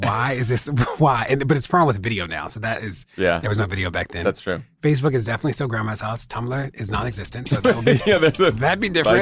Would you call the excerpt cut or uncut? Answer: uncut